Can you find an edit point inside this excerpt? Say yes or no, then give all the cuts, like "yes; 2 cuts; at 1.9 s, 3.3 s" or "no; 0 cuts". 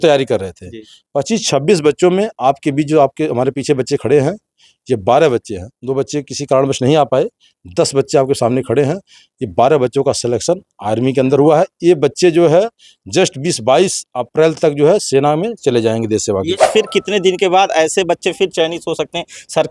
yes; 1 cut; at 16.6 s